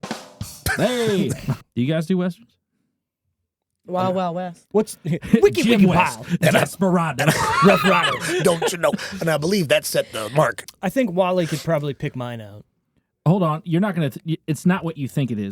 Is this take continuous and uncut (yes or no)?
no